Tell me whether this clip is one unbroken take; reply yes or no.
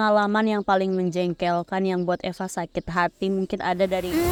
yes